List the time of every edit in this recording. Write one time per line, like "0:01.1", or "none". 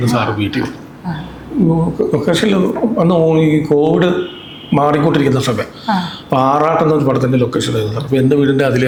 none